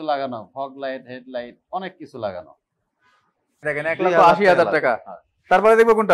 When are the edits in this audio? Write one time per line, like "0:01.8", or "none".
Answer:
0:03.6